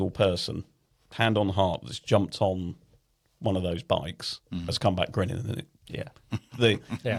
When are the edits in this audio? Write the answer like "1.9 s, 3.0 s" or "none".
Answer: none